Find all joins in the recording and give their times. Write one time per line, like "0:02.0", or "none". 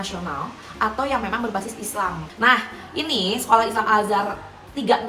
0:02.2